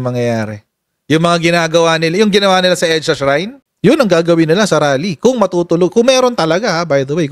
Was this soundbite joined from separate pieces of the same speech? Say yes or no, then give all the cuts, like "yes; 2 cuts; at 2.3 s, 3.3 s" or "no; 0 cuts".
yes; 1 cut; at 3.6 s